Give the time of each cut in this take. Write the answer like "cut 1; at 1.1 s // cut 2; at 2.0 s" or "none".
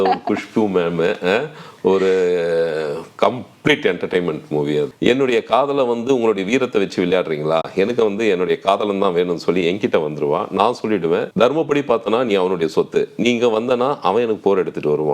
cut 1; at 4.9 s // cut 2; at 11.3 s